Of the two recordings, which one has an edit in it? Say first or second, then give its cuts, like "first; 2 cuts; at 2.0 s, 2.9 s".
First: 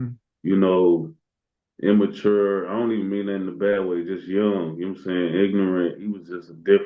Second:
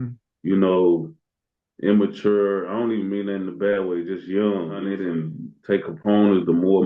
second; 1 cut; at 4.9 s